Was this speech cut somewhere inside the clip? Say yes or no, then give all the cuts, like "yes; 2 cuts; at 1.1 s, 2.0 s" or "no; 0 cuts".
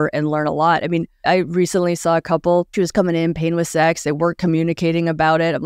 yes; 2 cuts; at 1.1 s, 2.7 s